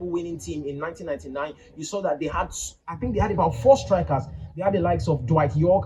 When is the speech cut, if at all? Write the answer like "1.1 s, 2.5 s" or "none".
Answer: none

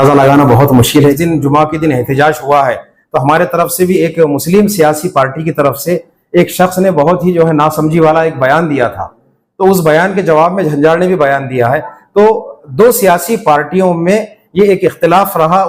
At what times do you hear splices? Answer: 1.1 s, 4.0 s

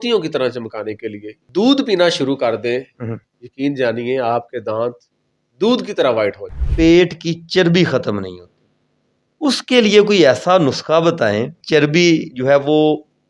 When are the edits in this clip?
1.4 s, 6.9 s, 11.6 s

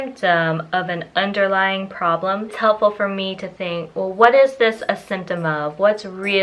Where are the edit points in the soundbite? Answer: 2.5 s

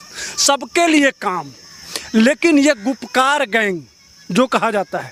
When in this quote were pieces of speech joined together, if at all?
none

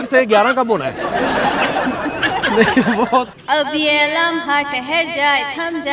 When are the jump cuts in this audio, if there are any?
3.3 s

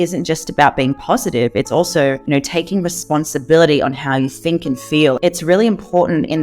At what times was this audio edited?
2.2 s, 5.2 s

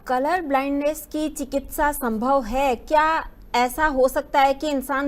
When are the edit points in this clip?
none

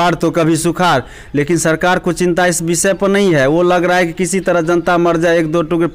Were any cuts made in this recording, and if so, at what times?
none

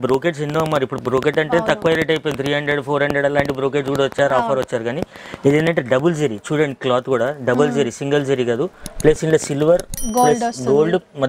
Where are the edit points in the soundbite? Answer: none

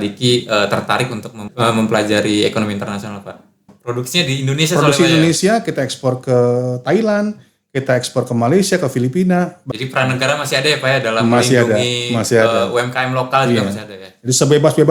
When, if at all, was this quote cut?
1.5 s, 3.8 s, 9.6 s

